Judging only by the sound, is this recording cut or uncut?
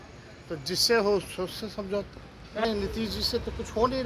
cut